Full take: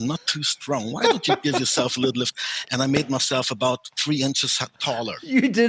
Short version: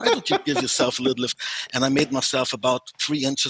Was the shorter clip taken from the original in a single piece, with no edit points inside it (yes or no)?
yes